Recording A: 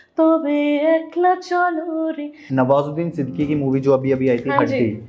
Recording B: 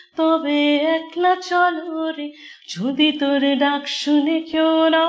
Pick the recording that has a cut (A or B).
A